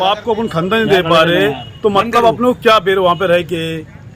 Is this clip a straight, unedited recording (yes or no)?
yes